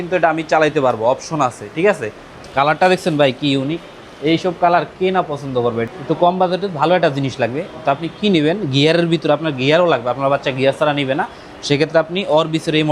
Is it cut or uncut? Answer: cut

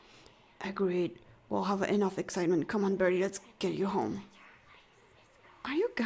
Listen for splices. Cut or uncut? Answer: uncut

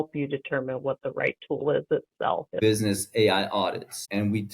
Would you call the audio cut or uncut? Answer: cut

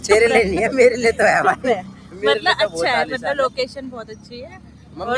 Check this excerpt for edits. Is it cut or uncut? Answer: uncut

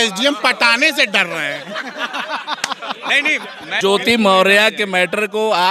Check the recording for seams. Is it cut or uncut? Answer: uncut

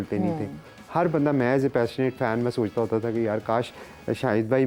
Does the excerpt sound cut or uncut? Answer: uncut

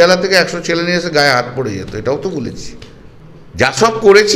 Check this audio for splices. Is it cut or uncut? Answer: uncut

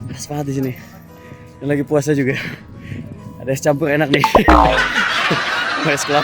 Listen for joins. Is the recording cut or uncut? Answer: uncut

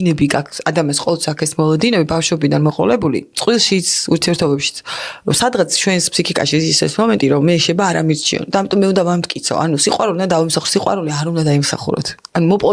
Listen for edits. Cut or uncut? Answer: uncut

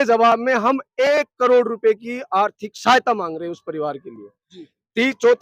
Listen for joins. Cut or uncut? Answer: uncut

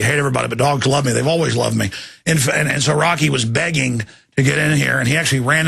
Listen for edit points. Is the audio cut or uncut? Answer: cut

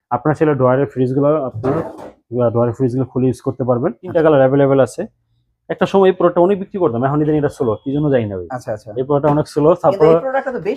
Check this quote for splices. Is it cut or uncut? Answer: cut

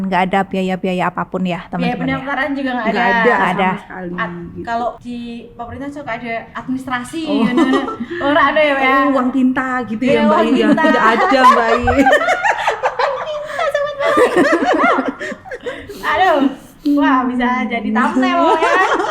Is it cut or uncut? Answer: cut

